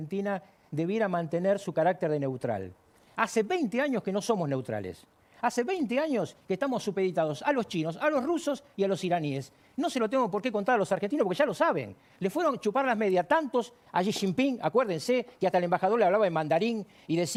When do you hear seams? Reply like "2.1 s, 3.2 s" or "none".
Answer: none